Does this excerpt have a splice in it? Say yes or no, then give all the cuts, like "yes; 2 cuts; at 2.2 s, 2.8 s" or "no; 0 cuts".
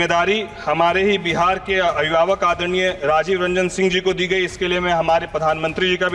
no; 0 cuts